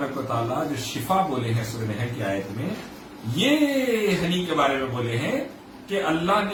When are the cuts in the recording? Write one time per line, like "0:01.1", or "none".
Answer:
none